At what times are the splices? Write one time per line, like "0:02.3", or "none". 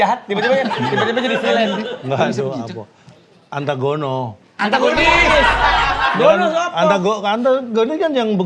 none

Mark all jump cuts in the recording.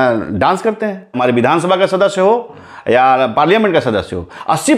0:01.2

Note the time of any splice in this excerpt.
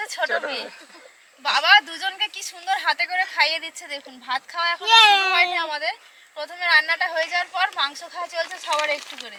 none

